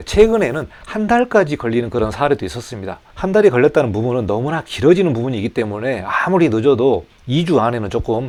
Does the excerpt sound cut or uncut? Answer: uncut